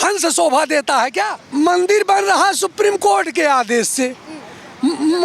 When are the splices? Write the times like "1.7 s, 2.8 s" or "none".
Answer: 1.4 s